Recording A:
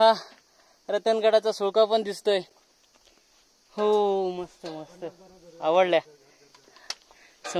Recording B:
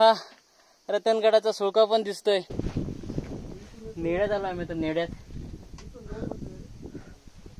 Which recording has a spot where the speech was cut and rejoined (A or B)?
B